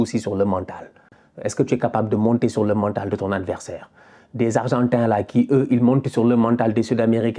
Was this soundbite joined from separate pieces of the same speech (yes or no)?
no